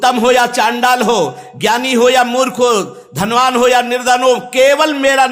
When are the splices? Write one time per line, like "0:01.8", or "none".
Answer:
none